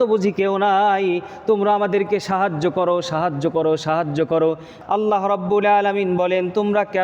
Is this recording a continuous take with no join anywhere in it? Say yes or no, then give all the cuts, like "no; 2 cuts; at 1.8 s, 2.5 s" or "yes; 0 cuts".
no; 1 cut; at 4.7 s